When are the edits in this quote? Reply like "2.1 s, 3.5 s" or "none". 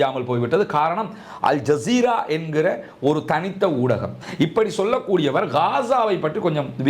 4.2 s